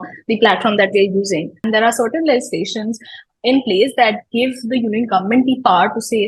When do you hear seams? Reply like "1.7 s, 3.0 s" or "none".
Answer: 1.5 s